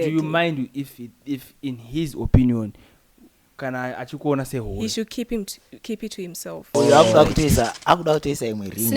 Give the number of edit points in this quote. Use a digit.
1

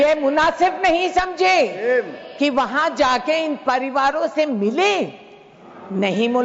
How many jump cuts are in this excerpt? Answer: 0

